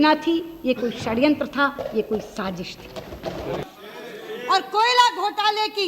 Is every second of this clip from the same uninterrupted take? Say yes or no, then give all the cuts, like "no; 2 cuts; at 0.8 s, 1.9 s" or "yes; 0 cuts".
no; 1 cut; at 3.6 s